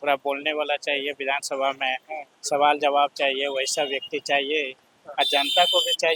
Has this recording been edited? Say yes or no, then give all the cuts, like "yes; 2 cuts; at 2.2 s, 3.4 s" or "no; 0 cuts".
no; 0 cuts